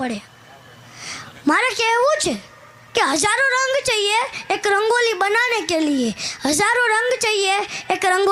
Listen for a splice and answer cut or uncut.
uncut